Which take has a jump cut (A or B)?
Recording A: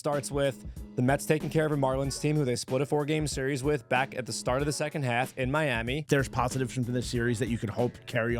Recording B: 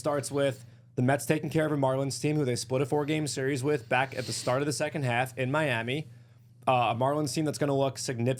A